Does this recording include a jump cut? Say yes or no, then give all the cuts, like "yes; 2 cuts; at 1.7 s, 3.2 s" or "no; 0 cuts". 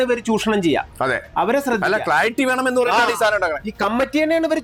no; 0 cuts